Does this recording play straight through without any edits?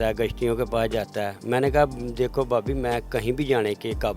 yes; 0 cuts

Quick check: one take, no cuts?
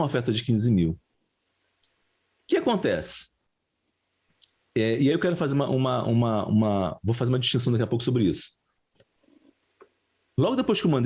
yes; 0 cuts

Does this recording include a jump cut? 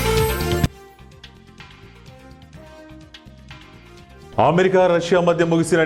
yes; 1 cut; at 3.6 s

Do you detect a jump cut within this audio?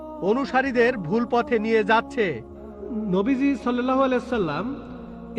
yes; 1 cut; at 2.5 s

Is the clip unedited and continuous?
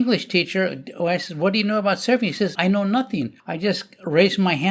no; 2 cuts; at 2.5 s, 3.4 s

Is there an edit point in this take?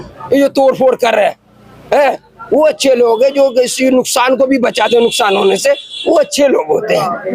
no; 0 cuts

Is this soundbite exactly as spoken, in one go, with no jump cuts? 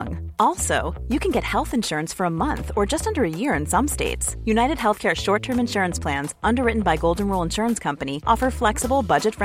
yes; 0 cuts

